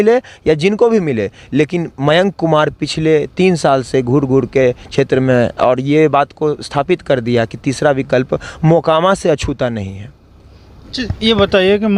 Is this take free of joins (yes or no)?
yes